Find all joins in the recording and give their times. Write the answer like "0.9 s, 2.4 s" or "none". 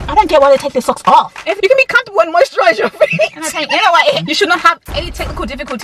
1.5 s, 4.2 s